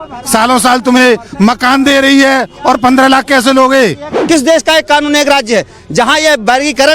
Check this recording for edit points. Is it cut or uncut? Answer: cut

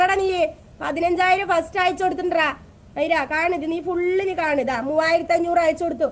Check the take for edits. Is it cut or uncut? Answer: uncut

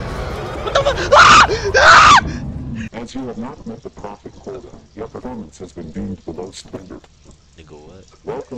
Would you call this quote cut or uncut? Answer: cut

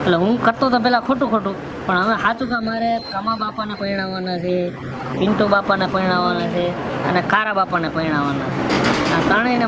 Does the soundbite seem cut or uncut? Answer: uncut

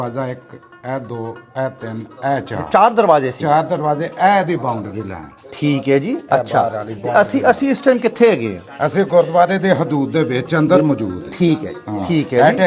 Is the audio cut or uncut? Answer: uncut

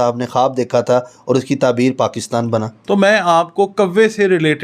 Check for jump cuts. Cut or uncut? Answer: cut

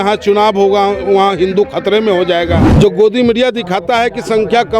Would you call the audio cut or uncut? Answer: cut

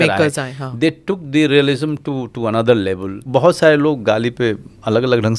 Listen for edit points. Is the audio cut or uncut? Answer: cut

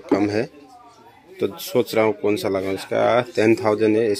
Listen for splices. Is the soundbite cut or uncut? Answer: uncut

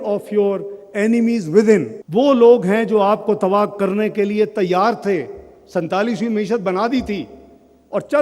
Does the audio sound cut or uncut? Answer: cut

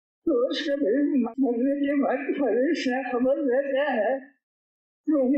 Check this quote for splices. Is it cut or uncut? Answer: cut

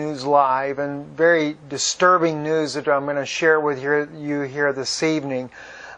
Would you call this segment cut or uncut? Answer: uncut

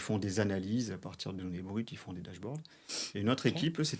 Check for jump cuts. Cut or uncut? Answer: uncut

